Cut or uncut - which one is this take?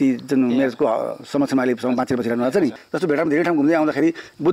cut